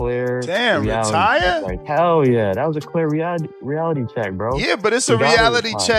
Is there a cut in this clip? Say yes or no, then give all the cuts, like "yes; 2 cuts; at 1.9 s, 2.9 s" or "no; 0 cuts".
no; 0 cuts